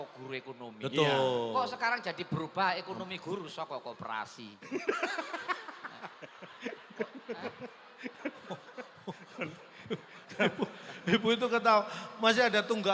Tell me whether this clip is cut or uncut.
uncut